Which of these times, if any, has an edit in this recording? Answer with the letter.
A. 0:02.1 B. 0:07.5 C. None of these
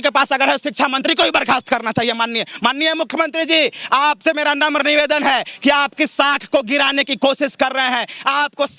C